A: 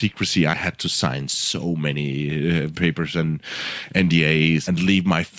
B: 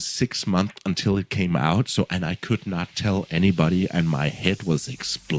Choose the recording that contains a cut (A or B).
A